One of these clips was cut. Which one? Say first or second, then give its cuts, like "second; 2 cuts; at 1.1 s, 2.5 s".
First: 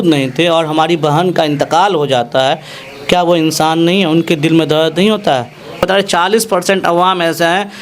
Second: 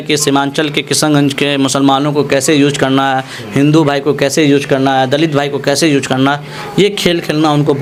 first; 1 cut; at 5.8 s